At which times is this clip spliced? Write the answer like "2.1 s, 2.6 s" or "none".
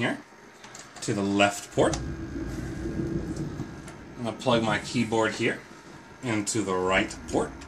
1.0 s